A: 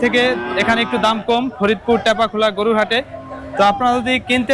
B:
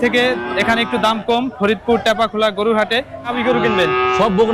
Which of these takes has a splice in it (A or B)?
B